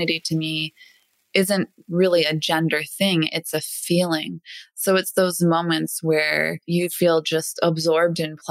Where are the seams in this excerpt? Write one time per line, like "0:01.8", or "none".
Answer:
0:06.6